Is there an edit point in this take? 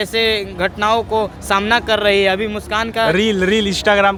no; 0 cuts

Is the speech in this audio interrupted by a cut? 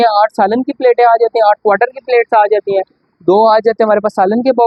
no; 0 cuts

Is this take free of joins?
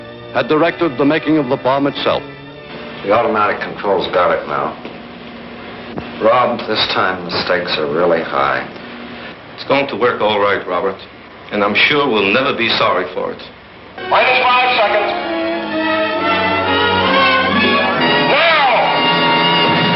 yes; 0 cuts

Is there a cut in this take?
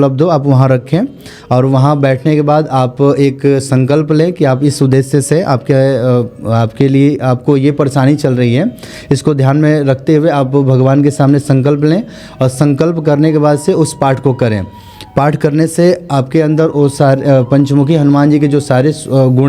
no; 0 cuts

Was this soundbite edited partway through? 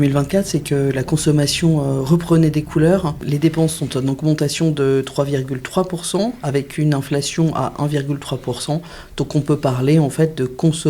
yes; 1 cut; at 3.2 s

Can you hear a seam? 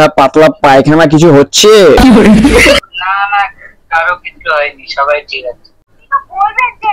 yes; 1 cut; at 5.8 s

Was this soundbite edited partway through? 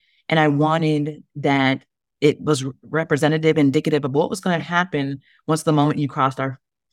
no; 0 cuts

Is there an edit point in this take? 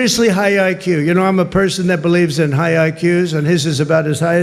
no; 0 cuts

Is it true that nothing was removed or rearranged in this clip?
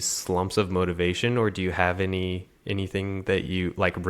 yes; 0 cuts

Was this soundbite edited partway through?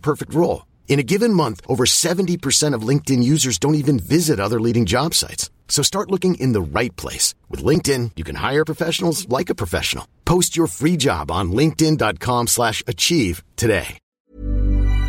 yes; 1 cut; at 14.0 s

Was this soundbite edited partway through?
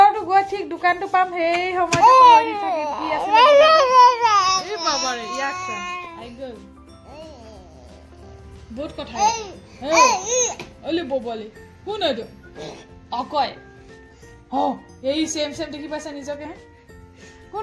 no; 0 cuts

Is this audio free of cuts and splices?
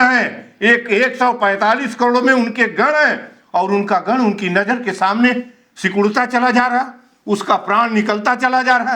yes; 0 cuts

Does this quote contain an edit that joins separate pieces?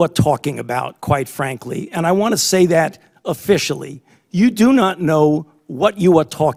no; 0 cuts

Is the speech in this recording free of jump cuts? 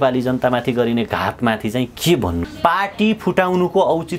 no; 1 cut; at 2.5 s

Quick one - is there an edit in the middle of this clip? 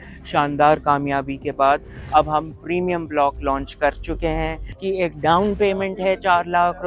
yes; 1 cut; at 4.8 s

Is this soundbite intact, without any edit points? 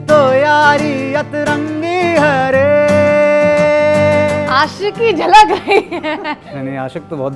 no; 2 cuts; at 4.4 s, 6.5 s

